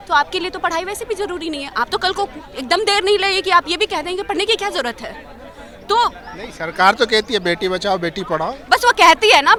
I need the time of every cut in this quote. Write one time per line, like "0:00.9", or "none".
none